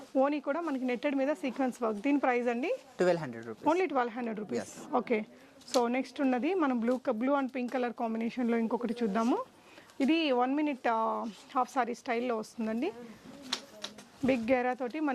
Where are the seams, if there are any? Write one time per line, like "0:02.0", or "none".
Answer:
none